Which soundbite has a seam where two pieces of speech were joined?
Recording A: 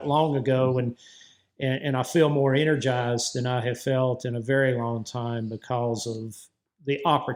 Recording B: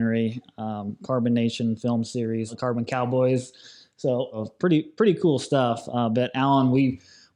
B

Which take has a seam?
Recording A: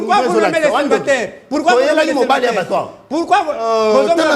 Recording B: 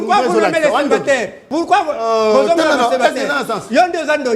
B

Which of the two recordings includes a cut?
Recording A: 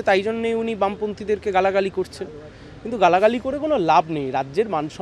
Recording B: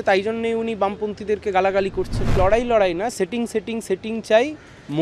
B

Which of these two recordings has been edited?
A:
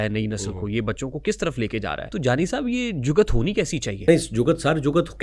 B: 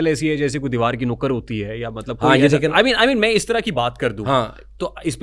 A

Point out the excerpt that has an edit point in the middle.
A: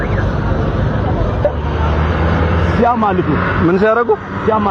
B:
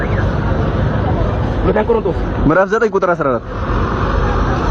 A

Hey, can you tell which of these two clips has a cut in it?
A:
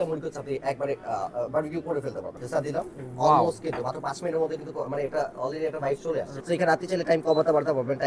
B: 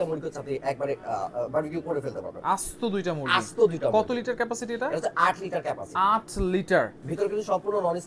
A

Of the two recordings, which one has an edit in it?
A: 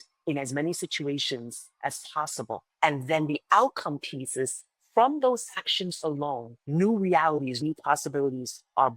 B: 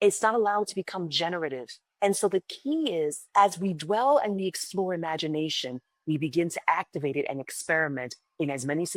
A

